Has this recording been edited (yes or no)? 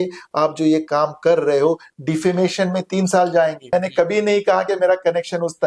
yes